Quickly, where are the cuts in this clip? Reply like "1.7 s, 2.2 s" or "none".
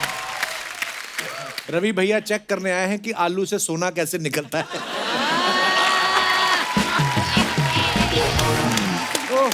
1.6 s